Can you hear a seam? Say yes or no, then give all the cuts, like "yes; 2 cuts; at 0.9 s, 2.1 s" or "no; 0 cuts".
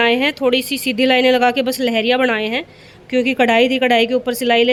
no; 0 cuts